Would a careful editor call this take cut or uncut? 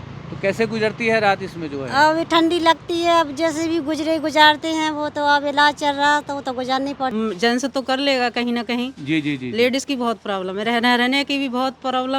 cut